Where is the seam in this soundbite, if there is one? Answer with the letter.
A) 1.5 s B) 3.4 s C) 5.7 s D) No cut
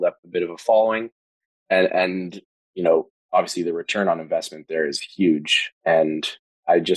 D